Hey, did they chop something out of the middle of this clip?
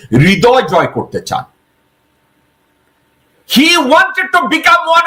no; 0 cuts

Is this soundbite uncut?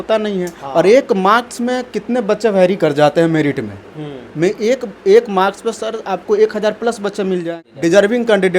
no; 1 cut; at 7.5 s

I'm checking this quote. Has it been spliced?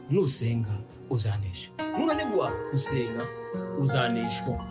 no; 0 cuts

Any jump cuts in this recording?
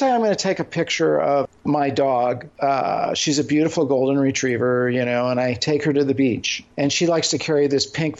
yes; 3 cuts; at 1.5 s, 2.5 s, 6.6 s

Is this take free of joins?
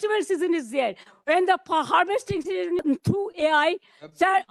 no; 1 cut; at 2.8 s

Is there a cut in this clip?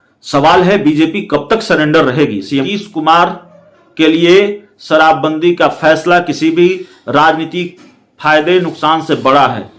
yes; 1 cut; at 2.7 s

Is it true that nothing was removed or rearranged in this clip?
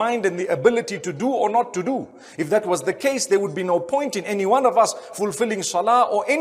yes; 0 cuts

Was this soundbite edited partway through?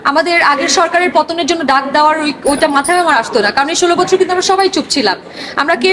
no; 0 cuts

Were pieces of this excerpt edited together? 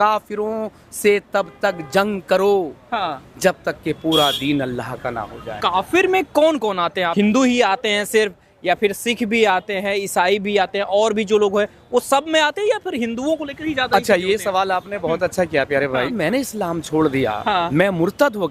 yes; 4 cuts; at 5.5 s, 7.1 s, 16.1 s, 17.7 s

